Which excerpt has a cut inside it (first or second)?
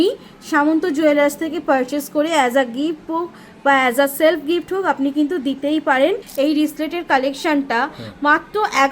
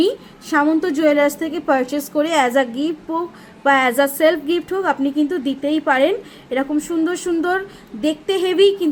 first